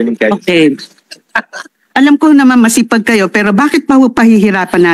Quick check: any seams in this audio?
no; 0 cuts

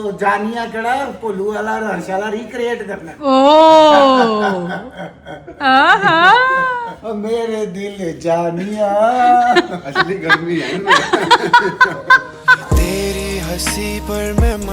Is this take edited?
yes; 1 cut; at 12.6 s

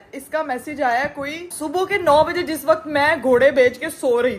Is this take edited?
yes; 1 cut; at 1.4 s

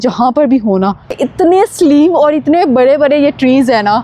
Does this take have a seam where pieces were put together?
yes; 1 cut; at 1.2 s

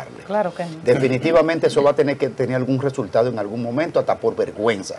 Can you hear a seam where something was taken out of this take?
no; 0 cuts

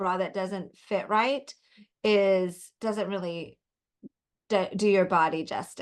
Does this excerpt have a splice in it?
no; 0 cuts

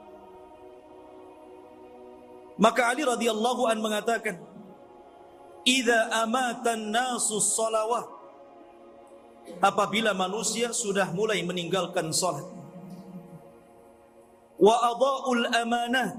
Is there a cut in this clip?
no; 0 cuts

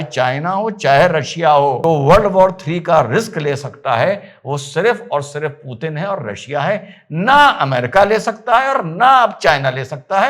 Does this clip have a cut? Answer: yes; 1 cut; at 1.8 s

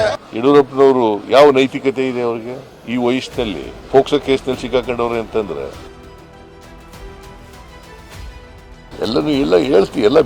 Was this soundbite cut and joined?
yes; 2 cuts; at 5.8 s, 8.9 s

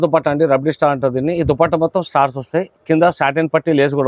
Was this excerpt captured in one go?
yes; 0 cuts

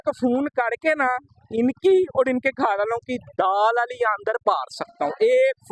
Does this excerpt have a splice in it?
no; 0 cuts

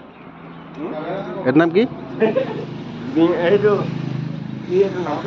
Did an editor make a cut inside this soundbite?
no; 0 cuts

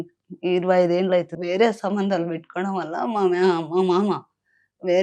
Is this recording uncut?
no; 1 cut; at 1.3 s

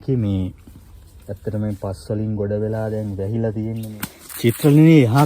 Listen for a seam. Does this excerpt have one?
yes; 1 cut; at 3.9 s

